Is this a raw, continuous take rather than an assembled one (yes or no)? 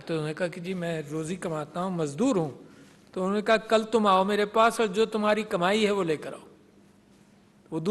yes